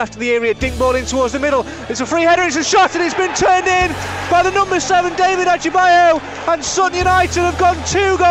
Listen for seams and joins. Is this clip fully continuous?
yes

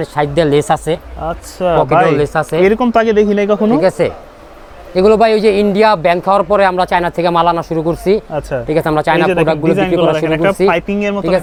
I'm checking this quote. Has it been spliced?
no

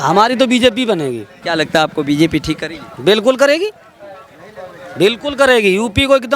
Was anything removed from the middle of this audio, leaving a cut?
yes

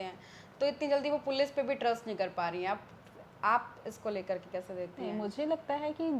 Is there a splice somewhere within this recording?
no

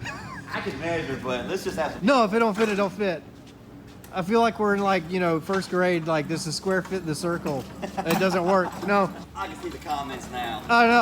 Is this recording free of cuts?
yes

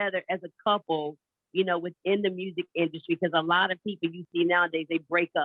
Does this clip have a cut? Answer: no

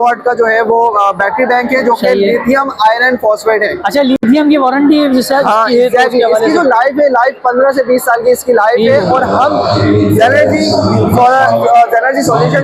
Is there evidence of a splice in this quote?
no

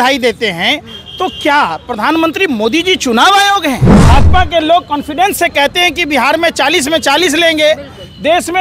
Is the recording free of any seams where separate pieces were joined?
no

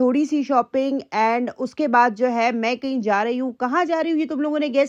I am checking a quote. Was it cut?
no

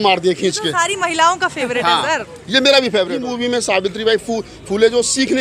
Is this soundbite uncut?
no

